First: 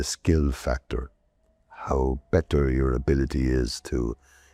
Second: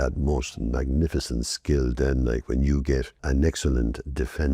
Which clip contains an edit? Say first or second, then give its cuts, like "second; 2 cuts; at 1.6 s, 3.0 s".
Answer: second; 1 cut; at 3.2 s